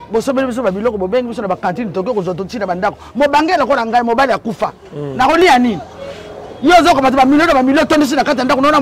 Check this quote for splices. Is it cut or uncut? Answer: uncut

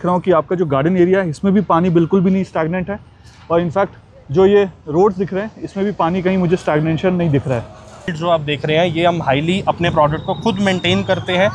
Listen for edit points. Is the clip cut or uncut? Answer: cut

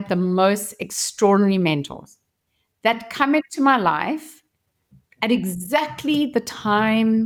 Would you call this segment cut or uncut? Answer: uncut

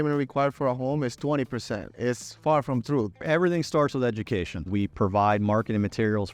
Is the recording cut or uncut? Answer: cut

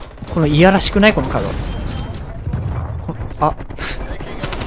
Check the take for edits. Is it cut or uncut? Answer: uncut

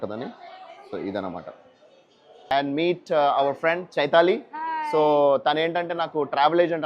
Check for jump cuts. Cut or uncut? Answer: cut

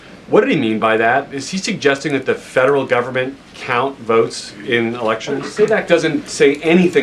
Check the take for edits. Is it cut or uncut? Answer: cut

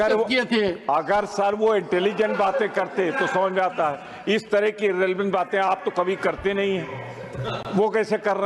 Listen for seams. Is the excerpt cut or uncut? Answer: uncut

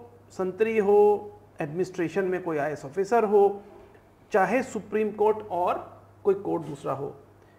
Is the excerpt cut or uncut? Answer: uncut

